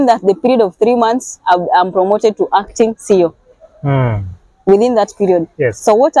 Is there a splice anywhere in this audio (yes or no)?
no